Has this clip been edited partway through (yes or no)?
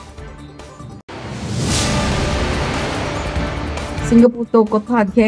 yes